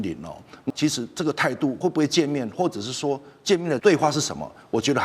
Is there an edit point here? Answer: yes; 3 cuts; at 0.7 s, 1.8 s, 3.8 s

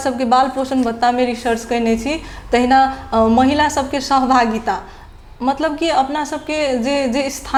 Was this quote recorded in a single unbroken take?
yes; 0 cuts

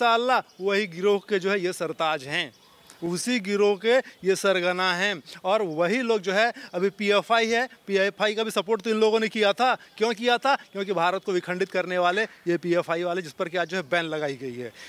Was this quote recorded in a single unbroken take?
yes; 0 cuts

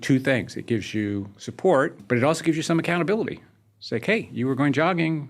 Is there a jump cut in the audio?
yes; 1 cut; at 2.0 s

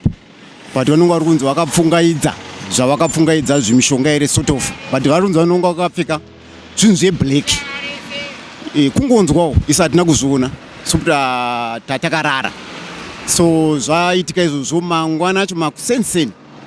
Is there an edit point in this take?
no; 0 cuts

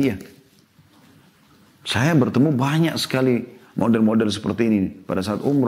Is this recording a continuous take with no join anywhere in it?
yes; 0 cuts

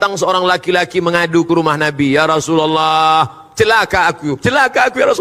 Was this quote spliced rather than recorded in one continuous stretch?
no; 0 cuts

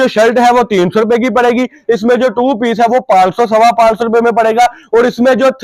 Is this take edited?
no; 0 cuts

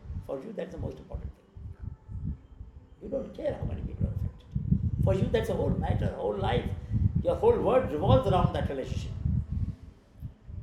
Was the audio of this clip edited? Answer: no; 0 cuts

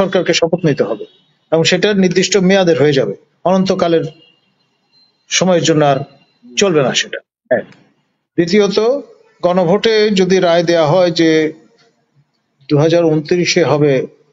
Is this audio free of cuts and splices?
yes; 0 cuts

